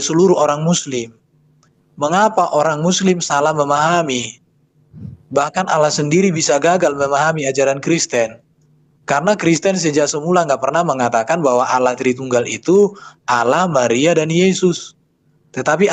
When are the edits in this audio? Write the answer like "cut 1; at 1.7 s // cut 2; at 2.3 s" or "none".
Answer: none